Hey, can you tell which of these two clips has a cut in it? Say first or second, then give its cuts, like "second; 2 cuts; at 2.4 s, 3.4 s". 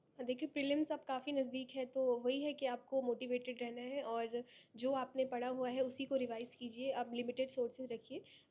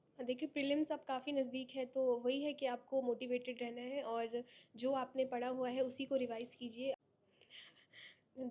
second; 1 cut; at 6.9 s